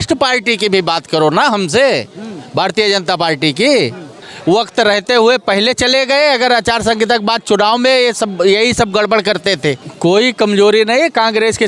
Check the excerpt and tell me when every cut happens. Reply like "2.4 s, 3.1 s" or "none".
4.3 s, 9.9 s

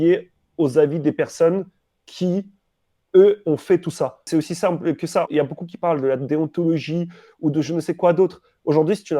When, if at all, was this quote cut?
4.2 s, 5.3 s

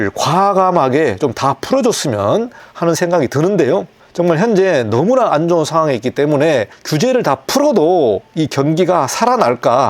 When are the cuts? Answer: 2.6 s, 6.8 s

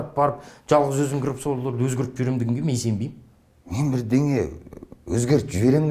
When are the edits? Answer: none

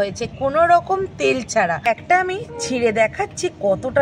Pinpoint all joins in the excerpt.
1.9 s

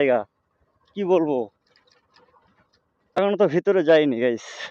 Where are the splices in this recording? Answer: 3.2 s

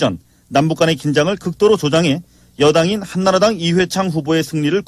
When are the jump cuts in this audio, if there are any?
2.9 s

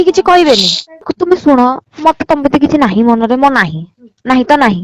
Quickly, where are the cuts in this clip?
1.1 s

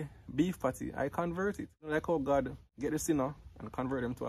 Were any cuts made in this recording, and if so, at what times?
1.9 s, 2.6 s

